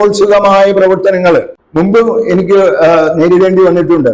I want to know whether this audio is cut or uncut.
uncut